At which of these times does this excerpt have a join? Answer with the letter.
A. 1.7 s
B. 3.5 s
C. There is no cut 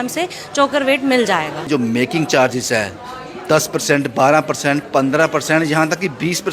A